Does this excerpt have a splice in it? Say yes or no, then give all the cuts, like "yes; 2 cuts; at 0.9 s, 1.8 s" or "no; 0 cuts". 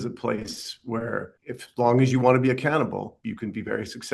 yes; 2 cuts; at 1.3 s, 3.1 s